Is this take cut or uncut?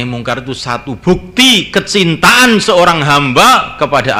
uncut